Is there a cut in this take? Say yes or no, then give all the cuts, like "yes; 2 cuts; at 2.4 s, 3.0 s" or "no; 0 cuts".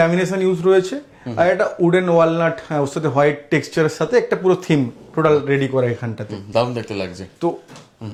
no; 0 cuts